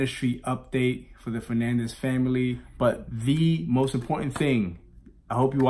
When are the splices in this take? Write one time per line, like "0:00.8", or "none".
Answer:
0:02.6